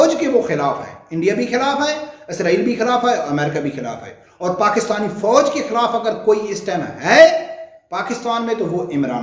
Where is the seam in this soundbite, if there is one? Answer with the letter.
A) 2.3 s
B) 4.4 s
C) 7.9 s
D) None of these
D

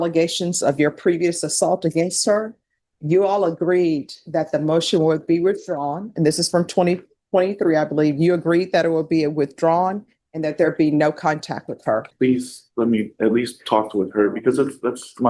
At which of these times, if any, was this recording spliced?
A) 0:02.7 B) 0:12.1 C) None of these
B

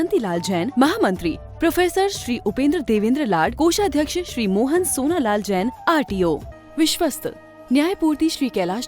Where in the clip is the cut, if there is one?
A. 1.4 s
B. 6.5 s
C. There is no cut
B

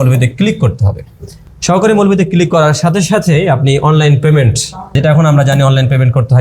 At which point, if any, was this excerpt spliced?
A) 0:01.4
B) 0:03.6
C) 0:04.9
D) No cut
D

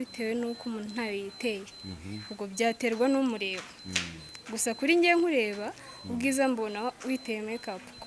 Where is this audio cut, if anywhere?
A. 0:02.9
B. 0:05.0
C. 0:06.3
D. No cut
D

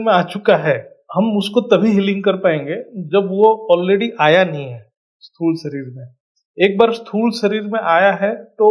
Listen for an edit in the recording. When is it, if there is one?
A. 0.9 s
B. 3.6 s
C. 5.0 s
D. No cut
A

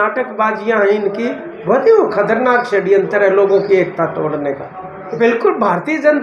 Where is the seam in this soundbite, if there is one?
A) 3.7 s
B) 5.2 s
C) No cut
B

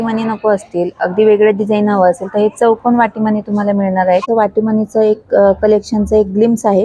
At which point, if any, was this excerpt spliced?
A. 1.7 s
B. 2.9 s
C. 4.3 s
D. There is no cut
C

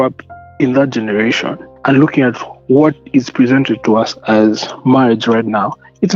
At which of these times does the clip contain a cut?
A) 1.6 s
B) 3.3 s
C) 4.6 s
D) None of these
A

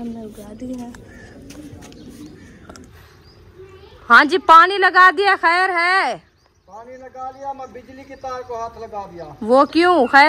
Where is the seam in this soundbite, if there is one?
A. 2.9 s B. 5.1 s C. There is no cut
A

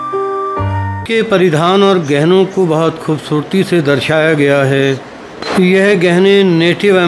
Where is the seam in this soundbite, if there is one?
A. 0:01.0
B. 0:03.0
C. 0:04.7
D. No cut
A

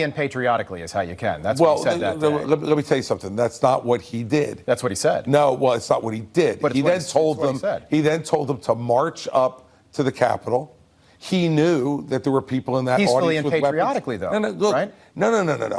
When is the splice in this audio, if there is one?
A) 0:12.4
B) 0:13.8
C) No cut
C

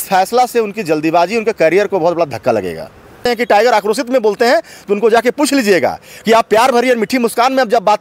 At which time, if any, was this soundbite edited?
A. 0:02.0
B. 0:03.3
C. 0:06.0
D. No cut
B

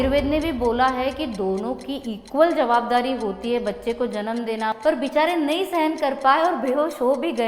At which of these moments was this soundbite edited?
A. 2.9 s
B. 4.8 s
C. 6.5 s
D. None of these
B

